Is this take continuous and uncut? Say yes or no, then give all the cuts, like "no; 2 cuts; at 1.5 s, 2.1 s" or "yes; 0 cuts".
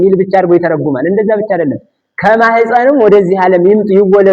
yes; 0 cuts